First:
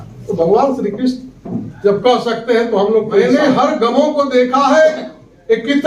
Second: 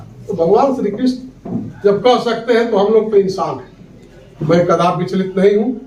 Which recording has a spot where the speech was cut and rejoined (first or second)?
first